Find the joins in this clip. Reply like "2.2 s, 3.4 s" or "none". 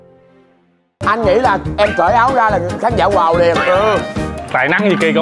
0.9 s